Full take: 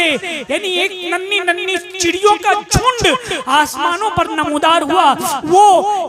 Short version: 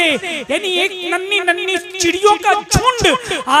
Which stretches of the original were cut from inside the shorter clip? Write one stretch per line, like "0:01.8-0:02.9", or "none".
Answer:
none